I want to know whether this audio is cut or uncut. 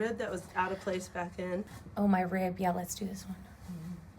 cut